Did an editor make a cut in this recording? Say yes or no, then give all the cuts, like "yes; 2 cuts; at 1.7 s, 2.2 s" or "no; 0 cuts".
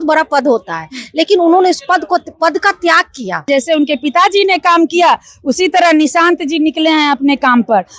yes; 1 cut; at 3.5 s